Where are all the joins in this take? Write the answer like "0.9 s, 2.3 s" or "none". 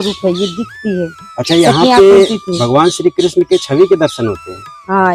none